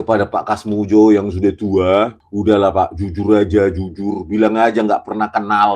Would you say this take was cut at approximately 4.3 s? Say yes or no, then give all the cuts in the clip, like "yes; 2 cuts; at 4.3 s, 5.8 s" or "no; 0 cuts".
no; 1 cut; at 2.2 s